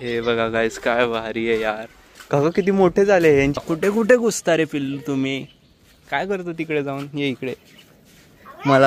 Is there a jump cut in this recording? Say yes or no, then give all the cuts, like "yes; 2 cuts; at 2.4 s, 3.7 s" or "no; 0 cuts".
yes; 1 cut; at 3.5 s